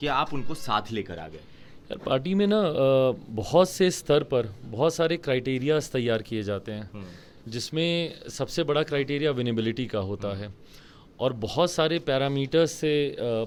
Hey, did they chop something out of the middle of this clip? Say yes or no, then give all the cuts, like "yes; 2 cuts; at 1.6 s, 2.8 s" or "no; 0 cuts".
no; 0 cuts